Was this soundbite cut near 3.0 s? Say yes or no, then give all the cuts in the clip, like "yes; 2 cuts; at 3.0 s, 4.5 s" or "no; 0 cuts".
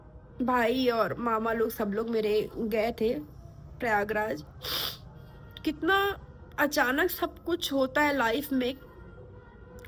no; 0 cuts